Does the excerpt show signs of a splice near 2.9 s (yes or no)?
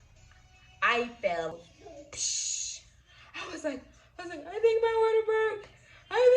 no